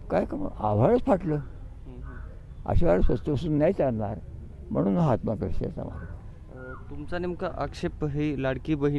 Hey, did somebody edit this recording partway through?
no; 0 cuts

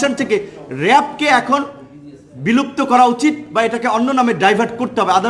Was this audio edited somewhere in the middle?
no; 0 cuts

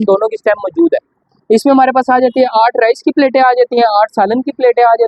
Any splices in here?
yes; 1 cut; at 1.3 s

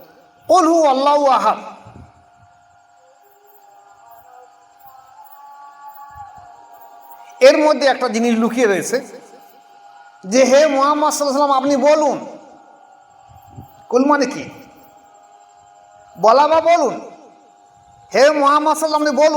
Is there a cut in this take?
no; 0 cuts

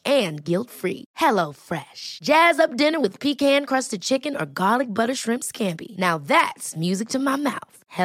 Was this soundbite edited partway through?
no; 0 cuts

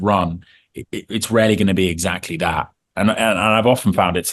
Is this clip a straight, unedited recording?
yes; 0 cuts

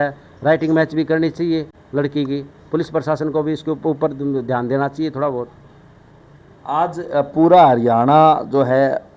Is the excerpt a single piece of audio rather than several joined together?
yes; 0 cuts

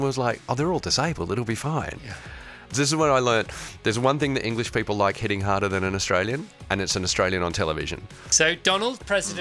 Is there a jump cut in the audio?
yes; 2 cuts; at 2.7 s, 8.2 s

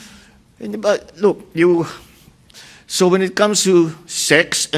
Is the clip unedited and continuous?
no; 1 cut; at 2.5 s

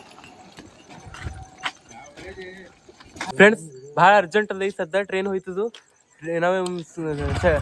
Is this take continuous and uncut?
yes; 0 cuts

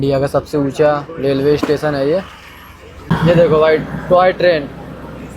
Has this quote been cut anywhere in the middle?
yes; 1 cut; at 3.0 s

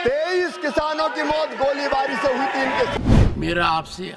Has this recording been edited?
yes; 1 cut; at 3.0 s

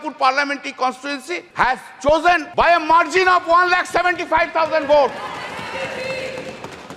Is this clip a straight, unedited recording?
no; 2 cuts; at 1.4 s, 2.5 s

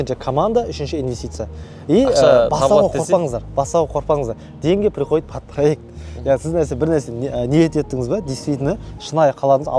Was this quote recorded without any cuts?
yes; 0 cuts

